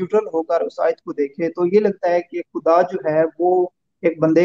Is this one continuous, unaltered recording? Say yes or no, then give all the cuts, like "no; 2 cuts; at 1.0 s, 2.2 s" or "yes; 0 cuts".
yes; 0 cuts